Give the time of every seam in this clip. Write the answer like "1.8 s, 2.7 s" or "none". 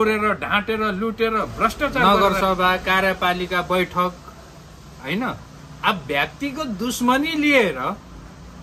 2.0 s